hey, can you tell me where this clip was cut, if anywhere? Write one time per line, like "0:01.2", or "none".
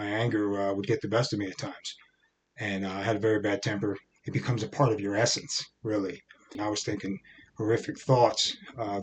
0:04.1
0:06.6